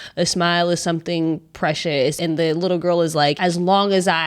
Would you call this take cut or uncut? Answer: cut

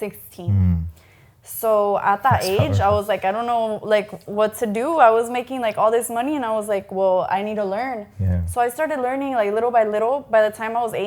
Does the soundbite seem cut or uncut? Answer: uncut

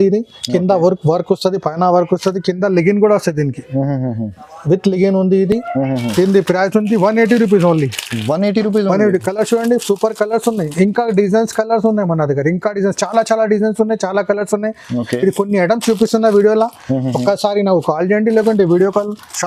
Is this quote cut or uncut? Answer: uncut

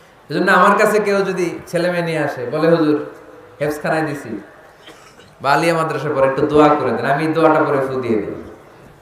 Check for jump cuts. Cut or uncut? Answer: uncut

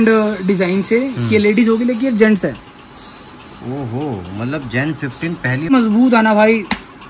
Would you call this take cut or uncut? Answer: cut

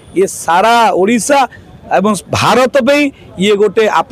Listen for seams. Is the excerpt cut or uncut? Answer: uncut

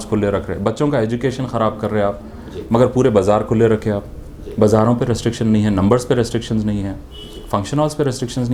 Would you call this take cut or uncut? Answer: uncut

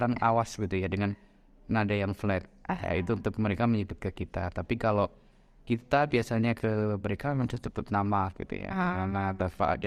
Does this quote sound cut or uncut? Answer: uncut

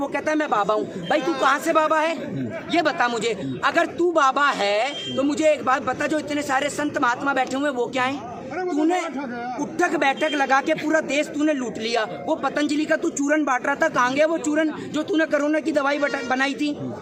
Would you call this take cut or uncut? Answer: uncut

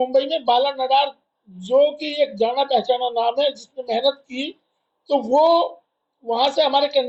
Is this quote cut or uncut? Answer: uncut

